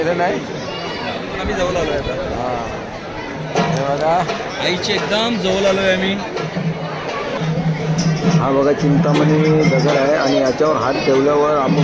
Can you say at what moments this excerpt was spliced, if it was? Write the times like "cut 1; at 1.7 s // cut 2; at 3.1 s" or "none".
none